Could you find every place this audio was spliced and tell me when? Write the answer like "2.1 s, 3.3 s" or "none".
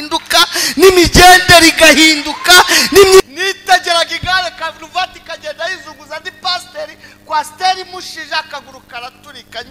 3.2 s